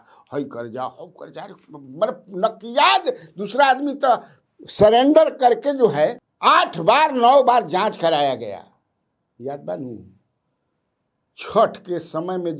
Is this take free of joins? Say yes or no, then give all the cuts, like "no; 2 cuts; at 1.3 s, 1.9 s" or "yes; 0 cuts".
yes; 0 cuts